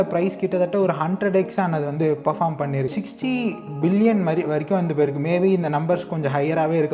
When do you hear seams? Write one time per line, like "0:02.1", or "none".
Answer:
0:02.9